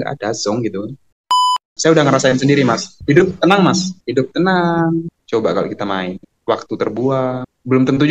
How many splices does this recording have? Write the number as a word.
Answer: four